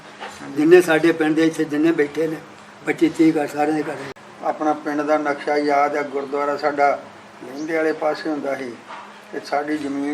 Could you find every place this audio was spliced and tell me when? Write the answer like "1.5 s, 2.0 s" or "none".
4.1 s